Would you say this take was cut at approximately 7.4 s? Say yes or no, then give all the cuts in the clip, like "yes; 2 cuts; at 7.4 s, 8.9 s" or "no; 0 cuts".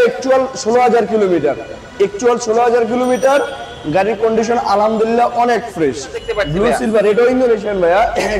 no; 1 cut; at 6.2 s